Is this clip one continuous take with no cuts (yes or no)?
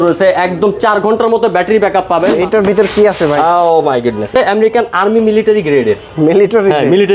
no